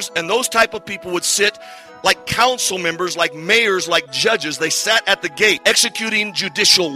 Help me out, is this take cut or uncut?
cut